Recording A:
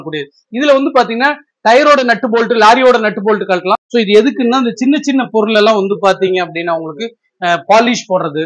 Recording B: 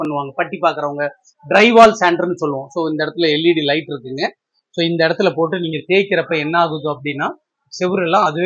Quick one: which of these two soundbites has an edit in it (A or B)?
A